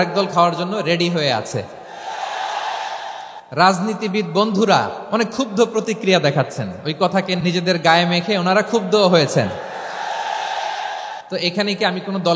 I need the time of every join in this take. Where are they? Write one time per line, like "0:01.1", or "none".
0:03.4
0:05.0
0:07.4
0:11.2